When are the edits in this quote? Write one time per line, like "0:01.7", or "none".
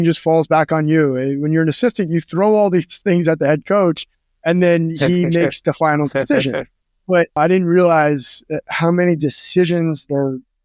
0:07.4

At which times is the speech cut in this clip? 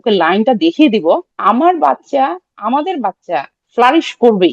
0:01.3
0:03.6

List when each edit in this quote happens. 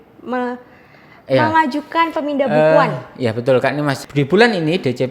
0:04.0

